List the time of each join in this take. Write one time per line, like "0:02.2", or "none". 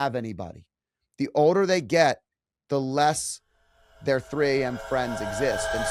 none